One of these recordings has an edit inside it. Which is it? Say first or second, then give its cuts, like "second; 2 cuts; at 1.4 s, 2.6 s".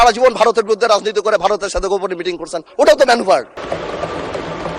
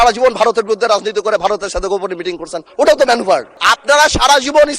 second; 1 cut; at 3.6 s